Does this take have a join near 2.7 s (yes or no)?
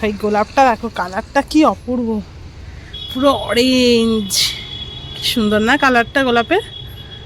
no